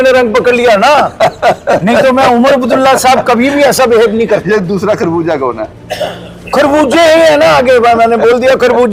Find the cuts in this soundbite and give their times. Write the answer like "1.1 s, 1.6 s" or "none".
none